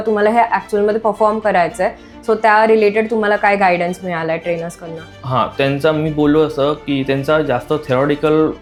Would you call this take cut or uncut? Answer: uncut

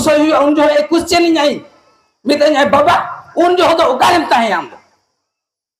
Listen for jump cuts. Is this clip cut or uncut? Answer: uncut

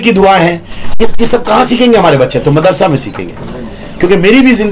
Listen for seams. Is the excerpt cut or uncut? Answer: uncut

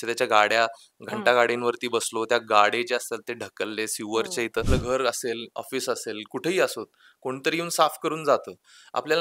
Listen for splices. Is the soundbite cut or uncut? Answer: cut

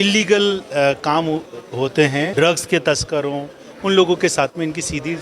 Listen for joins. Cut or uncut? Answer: cut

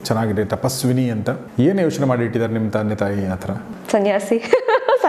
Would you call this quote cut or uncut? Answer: cut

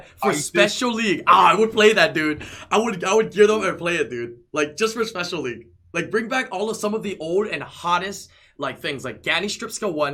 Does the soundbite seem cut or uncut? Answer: uncut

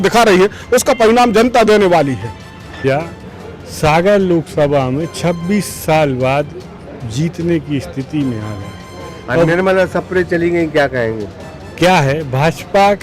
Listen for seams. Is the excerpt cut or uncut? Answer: cut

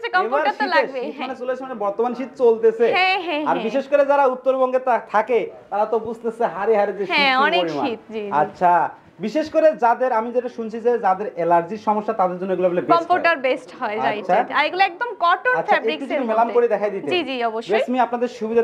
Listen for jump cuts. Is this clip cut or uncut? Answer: uncut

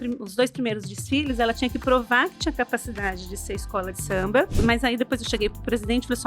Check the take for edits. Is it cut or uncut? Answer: cut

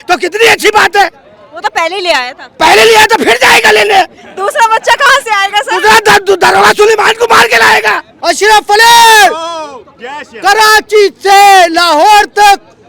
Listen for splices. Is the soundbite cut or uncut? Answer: cut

